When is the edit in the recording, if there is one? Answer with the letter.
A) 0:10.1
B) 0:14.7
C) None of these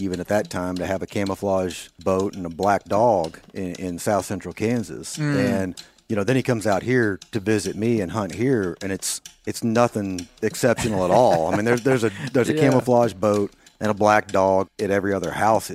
B